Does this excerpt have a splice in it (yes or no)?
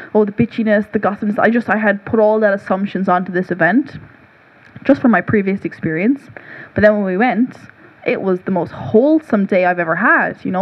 no